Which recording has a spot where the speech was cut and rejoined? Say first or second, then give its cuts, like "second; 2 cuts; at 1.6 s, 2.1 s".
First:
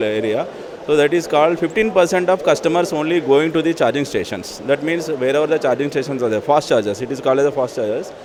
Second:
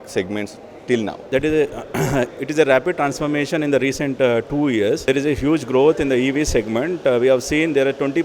second; 2 cuts; at 1.2 s, 5.1 s